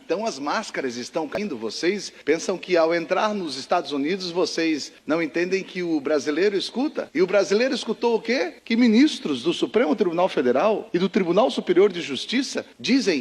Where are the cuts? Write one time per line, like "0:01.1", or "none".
0:01.3